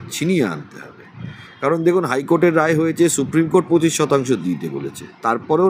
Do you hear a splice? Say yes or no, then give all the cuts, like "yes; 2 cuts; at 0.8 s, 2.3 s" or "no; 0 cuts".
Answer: no; 0 cuts